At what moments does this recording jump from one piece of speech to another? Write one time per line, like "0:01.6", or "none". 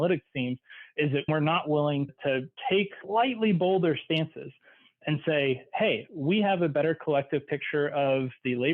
0:01.3